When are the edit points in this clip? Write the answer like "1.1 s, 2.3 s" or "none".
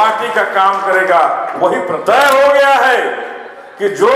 2.0 s